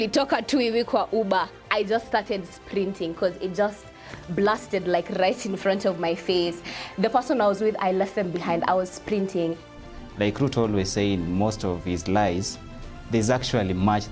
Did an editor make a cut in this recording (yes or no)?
yes